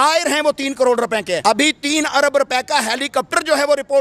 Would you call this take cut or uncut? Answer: cut